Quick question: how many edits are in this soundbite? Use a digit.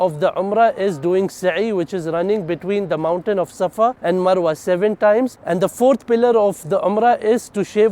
2